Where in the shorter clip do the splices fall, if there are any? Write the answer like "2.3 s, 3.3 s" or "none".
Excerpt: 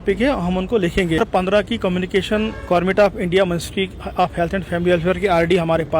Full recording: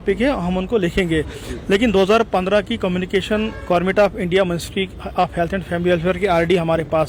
1.3 s